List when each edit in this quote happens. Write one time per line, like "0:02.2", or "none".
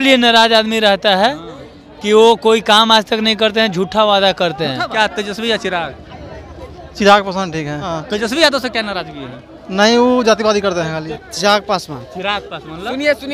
0:04.9
0:08.0
0:11.1